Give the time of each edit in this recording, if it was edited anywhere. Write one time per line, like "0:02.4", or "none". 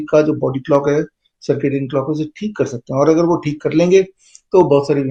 none